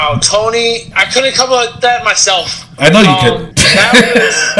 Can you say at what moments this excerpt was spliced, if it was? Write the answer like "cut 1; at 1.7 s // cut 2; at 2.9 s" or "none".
cut 1; at 0.9 s // cut 2; at 3.5 s

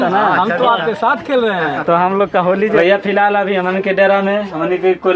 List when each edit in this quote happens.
cut 1; at 2.8 s

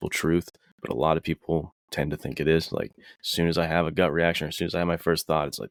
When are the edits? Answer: none

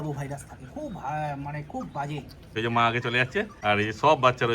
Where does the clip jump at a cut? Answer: cut 1; at 2.5 s // cut 2; at 3.5 s

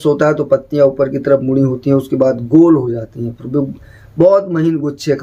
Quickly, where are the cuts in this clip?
none

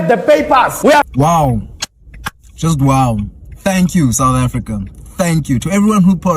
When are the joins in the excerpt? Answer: cut 1; at 1.1 s

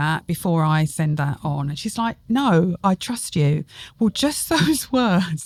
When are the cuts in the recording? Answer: none

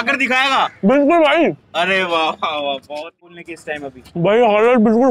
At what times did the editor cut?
cut 1; at 3.1 s

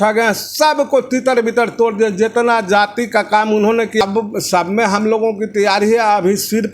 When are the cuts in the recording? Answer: cut 1; at 4.0 s

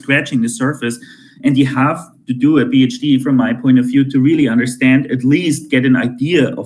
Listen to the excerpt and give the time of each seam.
none

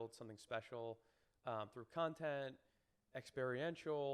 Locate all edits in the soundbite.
none

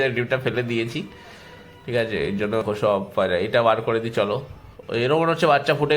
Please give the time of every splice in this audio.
cut 1; at 2.6 s

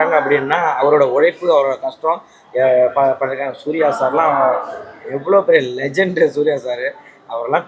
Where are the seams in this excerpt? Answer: none

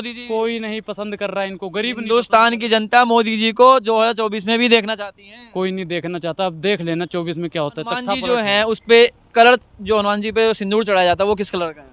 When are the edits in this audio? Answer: cut 1; at 8.1 s

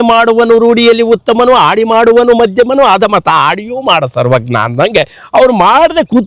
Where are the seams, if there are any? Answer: none

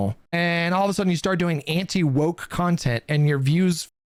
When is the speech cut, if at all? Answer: none

